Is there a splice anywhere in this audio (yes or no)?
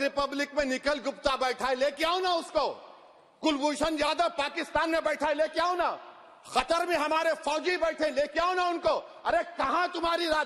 no